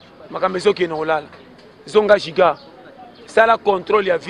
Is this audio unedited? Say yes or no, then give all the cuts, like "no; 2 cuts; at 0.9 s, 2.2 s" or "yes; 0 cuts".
yes; 0 cuts